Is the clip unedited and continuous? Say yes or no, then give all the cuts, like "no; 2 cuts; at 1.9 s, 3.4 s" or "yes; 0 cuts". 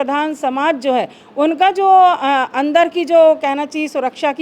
yes; 0 cuts